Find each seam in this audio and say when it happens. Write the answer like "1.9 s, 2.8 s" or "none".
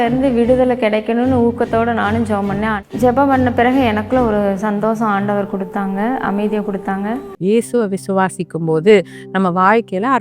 2.8 s, 7.3 s